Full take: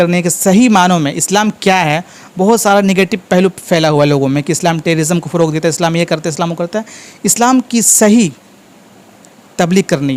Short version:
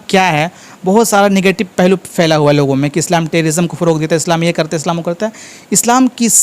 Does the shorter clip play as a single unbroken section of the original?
yes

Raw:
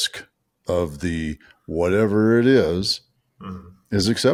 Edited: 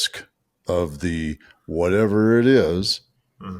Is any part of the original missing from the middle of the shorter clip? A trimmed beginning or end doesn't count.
no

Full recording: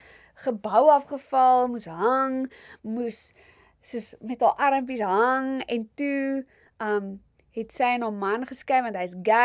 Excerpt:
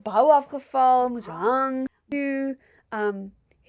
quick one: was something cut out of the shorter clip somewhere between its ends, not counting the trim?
yes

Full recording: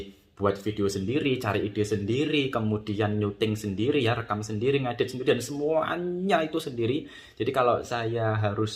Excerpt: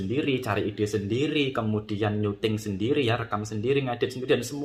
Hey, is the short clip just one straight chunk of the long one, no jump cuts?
yes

